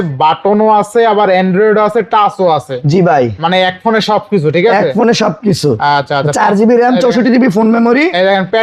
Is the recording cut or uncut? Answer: uncut